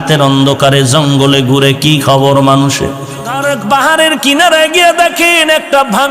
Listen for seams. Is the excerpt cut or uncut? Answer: cut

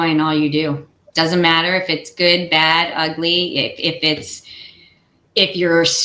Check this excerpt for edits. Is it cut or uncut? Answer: cut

